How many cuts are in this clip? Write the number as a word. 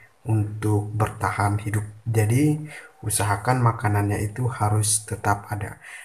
zero